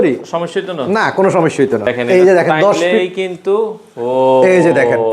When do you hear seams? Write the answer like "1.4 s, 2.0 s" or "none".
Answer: 1.9 s